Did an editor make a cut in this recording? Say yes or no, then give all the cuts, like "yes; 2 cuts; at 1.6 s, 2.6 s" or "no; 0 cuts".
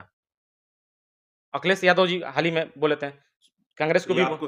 no; 0 cuts